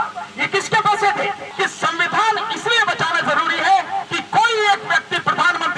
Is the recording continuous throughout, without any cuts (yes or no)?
no